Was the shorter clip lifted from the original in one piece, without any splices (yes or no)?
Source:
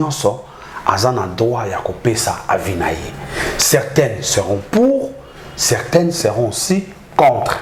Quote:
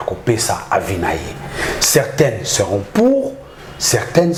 yes